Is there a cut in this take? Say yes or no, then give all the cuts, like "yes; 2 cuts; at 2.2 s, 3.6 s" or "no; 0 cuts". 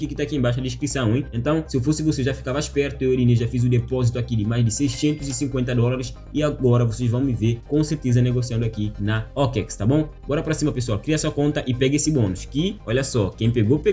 no; 0 cuts